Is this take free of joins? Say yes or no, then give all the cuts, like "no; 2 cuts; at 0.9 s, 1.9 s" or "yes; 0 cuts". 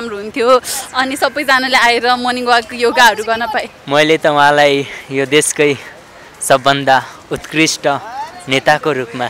no; 1 cut; at 3.7 s